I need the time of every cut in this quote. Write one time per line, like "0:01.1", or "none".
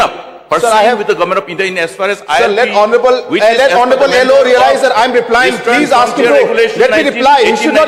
none